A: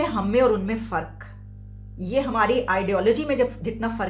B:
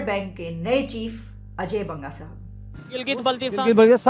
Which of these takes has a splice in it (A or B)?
B